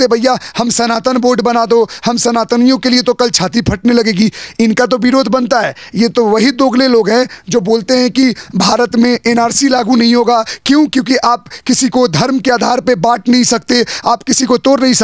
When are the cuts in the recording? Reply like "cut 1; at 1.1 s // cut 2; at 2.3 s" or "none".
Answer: none